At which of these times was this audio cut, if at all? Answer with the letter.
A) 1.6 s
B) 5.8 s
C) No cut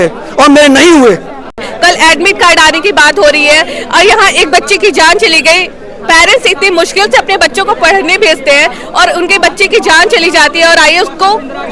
A